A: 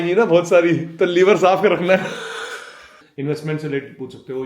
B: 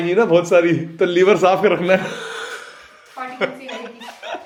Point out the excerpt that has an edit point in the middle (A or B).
A